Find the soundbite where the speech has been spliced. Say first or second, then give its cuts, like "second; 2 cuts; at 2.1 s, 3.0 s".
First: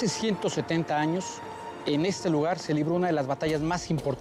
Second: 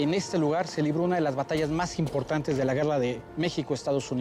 second; 1 cut; at 3.2 s